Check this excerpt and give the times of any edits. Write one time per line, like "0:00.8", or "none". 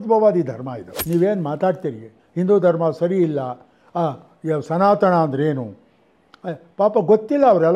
0:00.9